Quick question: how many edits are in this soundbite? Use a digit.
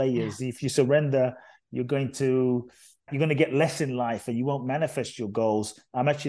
1